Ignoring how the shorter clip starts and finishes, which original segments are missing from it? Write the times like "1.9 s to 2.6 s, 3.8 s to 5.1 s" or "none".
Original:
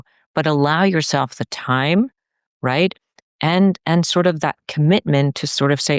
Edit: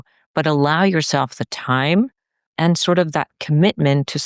2.5 s to 3.8 s